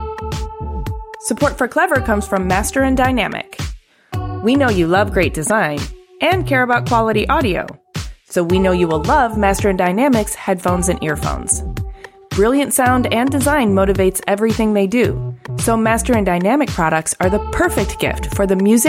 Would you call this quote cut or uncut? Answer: cut